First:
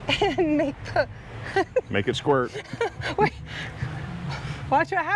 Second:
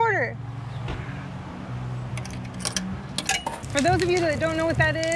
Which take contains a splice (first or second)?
second